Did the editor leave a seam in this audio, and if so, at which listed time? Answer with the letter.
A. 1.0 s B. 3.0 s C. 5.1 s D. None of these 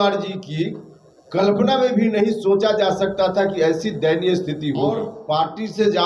C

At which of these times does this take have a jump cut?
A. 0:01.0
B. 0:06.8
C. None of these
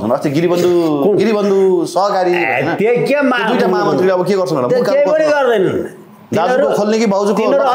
C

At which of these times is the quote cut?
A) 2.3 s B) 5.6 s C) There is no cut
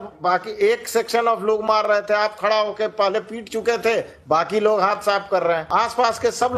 B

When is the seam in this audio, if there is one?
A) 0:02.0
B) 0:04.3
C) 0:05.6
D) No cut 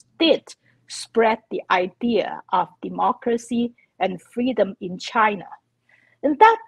D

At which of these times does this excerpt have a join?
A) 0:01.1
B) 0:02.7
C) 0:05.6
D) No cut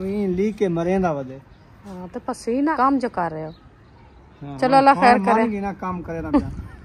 B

